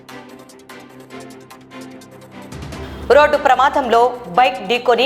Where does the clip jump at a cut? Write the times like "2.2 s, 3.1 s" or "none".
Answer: 0.9 s, 1.6 s